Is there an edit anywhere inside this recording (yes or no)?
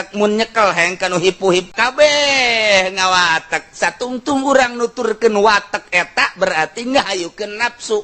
yes